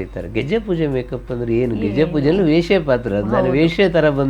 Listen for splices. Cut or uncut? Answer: uncut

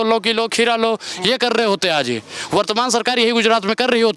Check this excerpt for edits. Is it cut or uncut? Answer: uncut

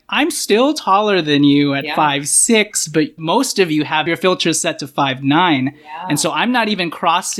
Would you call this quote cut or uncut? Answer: cut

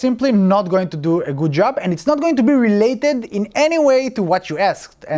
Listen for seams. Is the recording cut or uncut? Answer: uncut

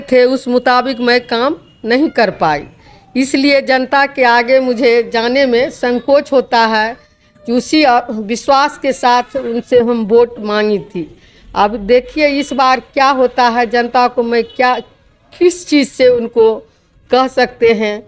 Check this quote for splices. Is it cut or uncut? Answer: uncut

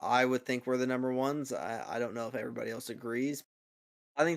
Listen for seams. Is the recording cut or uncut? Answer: cut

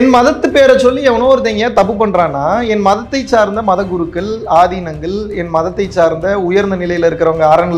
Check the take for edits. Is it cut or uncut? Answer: uncut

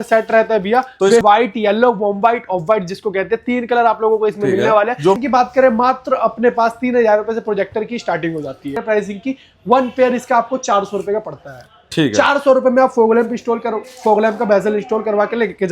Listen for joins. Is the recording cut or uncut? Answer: cut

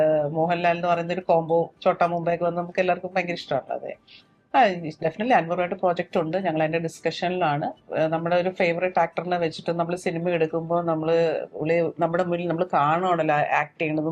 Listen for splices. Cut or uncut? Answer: cut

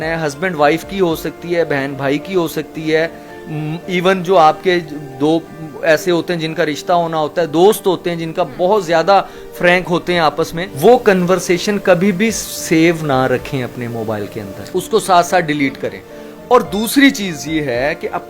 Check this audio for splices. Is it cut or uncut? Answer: uncut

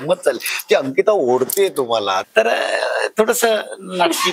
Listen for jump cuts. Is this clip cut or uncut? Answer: cut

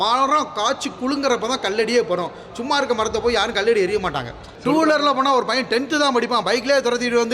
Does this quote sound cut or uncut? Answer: cut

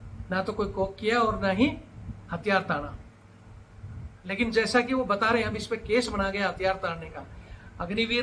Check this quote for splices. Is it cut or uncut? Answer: uncut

